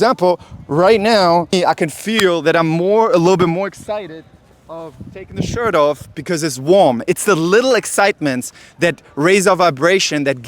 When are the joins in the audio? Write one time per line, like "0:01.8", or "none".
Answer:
0:01.5

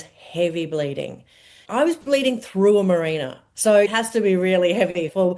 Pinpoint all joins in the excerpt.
0:01.6

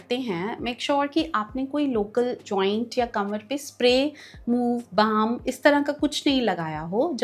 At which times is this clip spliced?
none

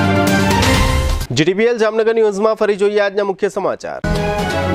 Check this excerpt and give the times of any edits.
none

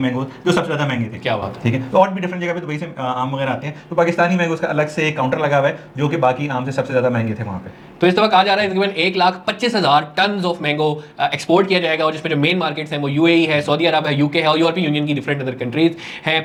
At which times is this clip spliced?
none

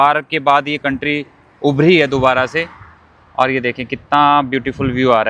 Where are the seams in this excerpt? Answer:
none

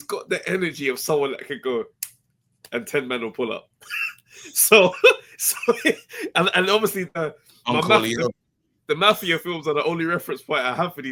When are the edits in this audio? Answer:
none

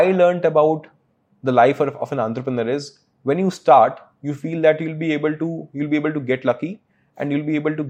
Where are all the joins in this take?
none

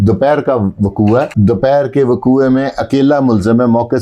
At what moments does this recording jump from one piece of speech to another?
0:01.3

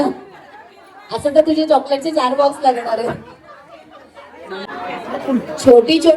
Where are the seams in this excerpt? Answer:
0:04.7

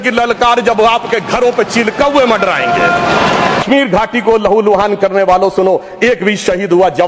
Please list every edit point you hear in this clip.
0:03.6

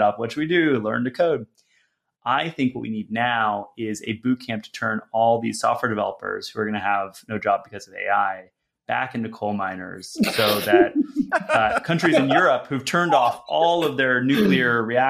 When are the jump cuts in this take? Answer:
none

